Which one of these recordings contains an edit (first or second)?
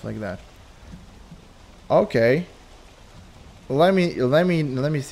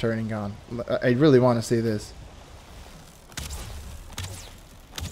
second